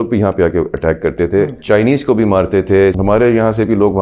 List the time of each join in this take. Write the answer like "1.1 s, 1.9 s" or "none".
1.6 s, 3.0 s